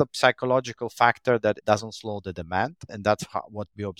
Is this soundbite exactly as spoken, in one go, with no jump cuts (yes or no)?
yes